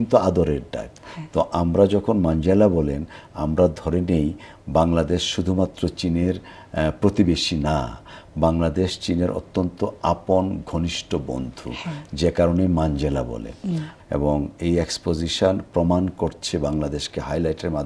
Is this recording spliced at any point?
yes; 1 cut; at 13.9 s

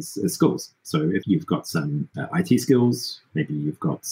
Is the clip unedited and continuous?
no; 2 cuts; at 1.2 s, 2.1 s

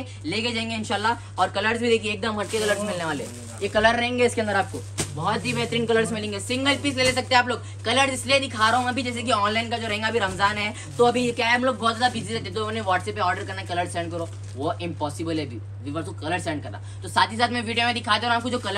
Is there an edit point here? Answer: no; 0 cuts

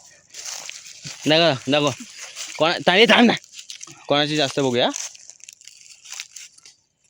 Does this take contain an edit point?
no; 0 cuts

